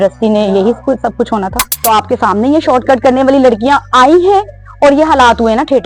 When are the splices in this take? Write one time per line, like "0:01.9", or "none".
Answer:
0:01.7